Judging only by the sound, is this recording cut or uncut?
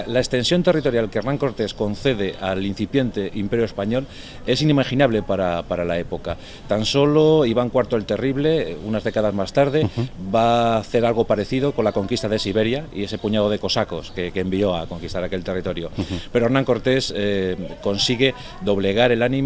uncut